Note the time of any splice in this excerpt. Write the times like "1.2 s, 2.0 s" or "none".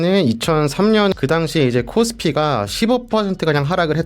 1.1 s